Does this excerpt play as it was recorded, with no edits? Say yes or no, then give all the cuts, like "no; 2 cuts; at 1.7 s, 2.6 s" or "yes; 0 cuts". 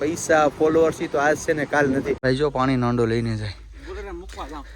no; 1 cut; at 2.2 s